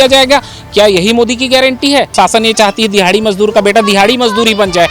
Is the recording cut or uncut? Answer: cut